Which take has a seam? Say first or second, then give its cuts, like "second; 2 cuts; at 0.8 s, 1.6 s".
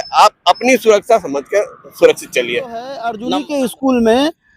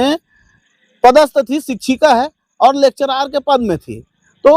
first; 1 cut; at 3.2 s